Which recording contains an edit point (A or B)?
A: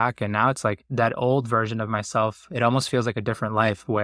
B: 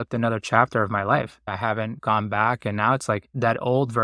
B